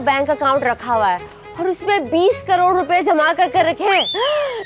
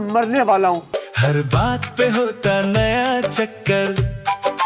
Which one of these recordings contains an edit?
second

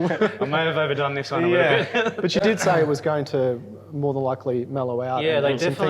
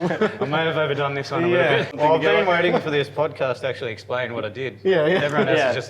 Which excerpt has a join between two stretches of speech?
second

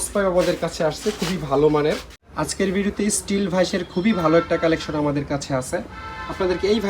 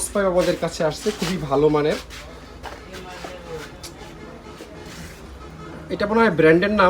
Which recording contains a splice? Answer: first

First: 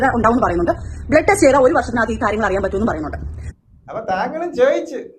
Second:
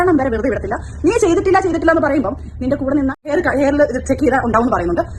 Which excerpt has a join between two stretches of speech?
second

